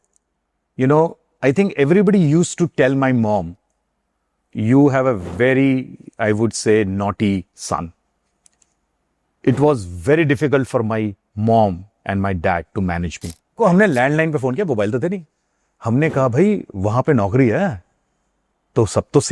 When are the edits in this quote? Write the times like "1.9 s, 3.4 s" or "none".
13.6 s